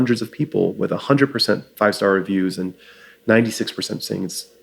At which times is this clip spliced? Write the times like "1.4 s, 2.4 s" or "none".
1.7 s